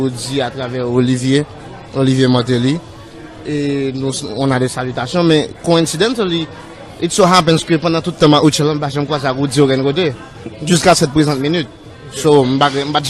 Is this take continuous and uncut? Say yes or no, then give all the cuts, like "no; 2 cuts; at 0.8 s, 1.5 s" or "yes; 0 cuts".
yes; 0 cuts